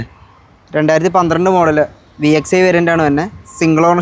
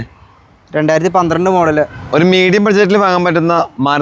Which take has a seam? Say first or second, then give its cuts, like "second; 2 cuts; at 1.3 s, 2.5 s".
second; 1 cut; at 2.0 s